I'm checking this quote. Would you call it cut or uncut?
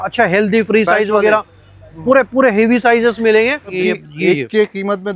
cut